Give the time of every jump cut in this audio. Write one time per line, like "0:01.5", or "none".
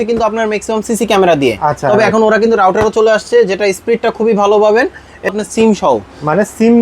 0:05.3

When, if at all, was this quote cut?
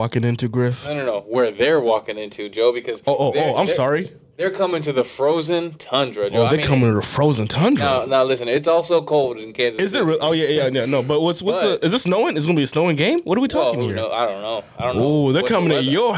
none

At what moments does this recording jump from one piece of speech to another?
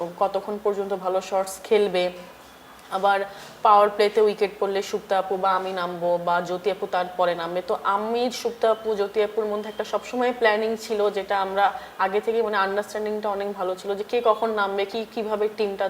none

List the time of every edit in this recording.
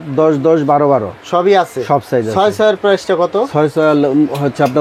none

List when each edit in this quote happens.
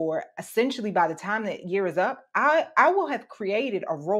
none

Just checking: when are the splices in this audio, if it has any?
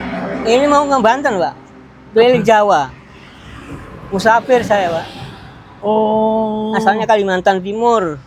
none

